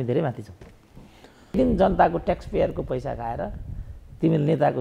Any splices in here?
yes; 1 cut; at 1.5 s

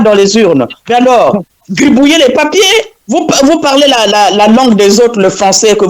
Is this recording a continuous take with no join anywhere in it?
yes; 0 cuts

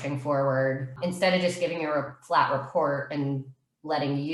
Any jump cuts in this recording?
yes; 1 cut; at 1.0 s

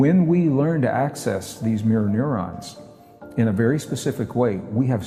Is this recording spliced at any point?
no; 0 cuts

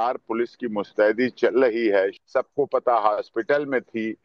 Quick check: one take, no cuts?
no; 1 cut; at 2.2 s

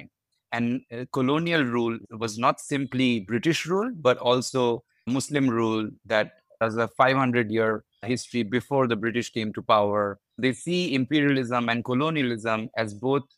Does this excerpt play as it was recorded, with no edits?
no; 1 cut; at 10.2 s

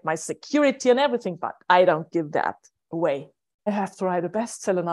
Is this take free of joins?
no; 1 cut; at 3.7 s

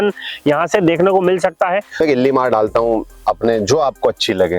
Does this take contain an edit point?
yes; 1 cut; at 2.0 s

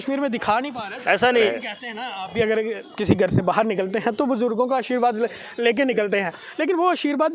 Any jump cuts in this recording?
yes; 1 cut; at 1.5 s

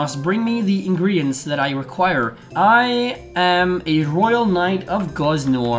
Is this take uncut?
no; 1 cut; at 2.4 s

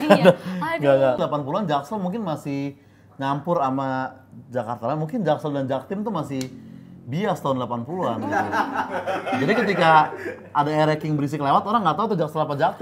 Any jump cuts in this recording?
yes; 1 cut; at 1.2 s

